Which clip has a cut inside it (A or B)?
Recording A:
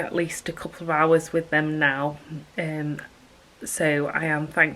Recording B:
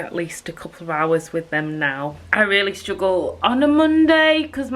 B